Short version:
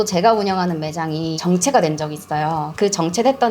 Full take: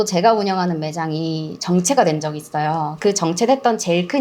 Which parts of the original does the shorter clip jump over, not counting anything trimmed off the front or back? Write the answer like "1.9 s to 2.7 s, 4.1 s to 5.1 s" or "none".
1.3 s to 1.6 s